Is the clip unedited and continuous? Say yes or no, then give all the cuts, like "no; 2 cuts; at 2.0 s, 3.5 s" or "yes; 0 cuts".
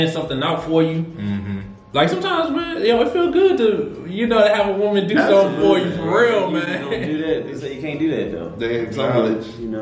yes; 0 cuts